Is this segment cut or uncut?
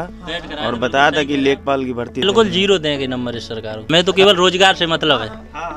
cut